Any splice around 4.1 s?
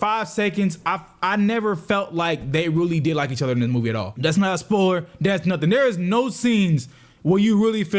yes; 1 cut; at 4.1 s

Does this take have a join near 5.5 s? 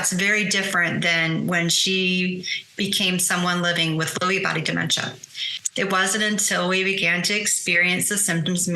yes; 1 cut; at 5.5 s

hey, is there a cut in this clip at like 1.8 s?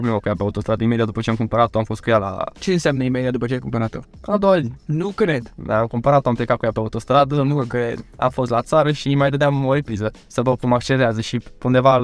no; 0 cuts

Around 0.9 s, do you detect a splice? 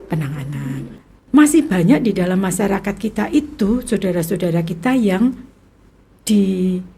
yes; 1 cut; at 0.9 s

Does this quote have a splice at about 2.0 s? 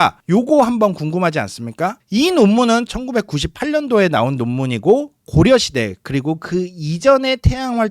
yes; 1 cut; at 2.0 s

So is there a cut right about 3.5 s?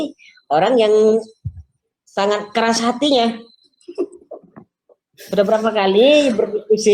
no; 0 cuts

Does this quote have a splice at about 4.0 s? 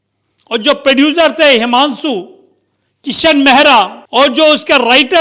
yes; 1 cut; at 4.0 s

